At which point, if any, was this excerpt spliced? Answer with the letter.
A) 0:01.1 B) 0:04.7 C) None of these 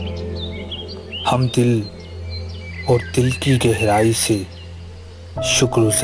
A